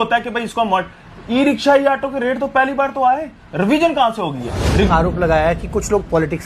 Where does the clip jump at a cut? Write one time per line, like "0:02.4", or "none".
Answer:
0:04.9

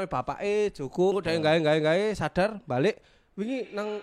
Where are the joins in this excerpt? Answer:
0:01.2

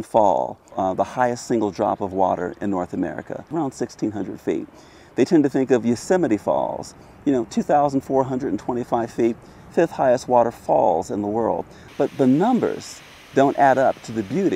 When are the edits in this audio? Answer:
0:13.1

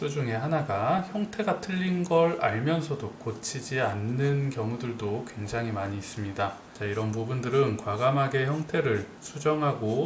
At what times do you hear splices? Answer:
0:06.7

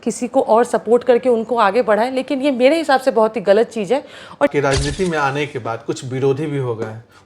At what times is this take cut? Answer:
0:04.5

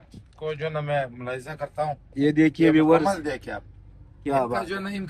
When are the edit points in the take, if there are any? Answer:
none

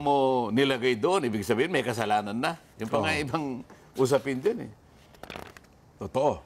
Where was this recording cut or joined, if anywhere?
none

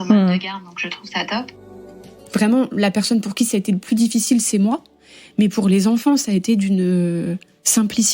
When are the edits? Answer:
0:02.1

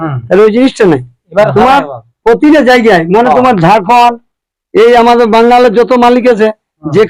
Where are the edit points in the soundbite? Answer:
none

